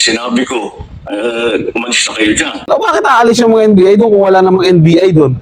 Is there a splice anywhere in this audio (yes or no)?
yes